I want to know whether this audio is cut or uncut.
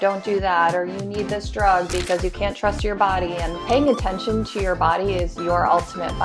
cut